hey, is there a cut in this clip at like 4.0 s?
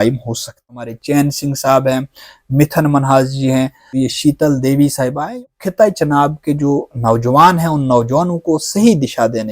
yes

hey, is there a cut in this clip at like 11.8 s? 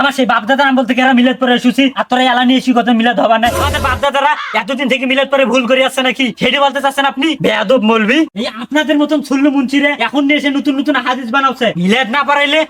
yes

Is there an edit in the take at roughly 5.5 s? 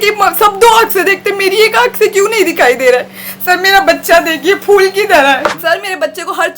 yes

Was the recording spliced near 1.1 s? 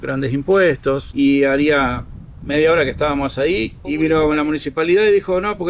yes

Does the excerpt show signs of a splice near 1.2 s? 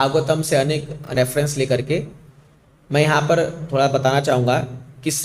yes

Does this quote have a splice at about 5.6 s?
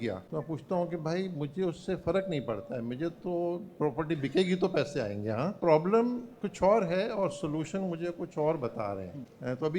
yes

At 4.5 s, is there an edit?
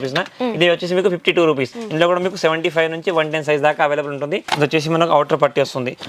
yes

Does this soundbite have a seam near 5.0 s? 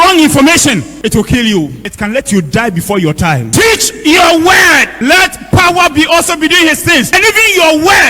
yes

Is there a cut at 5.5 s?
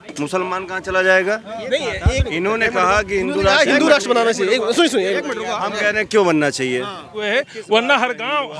no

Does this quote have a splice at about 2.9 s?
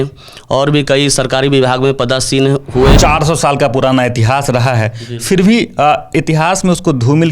yes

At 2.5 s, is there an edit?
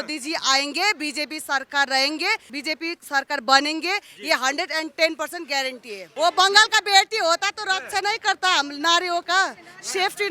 yes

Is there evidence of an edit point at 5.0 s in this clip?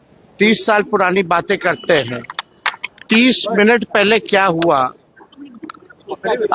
no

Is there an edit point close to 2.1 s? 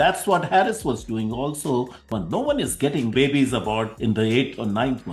yes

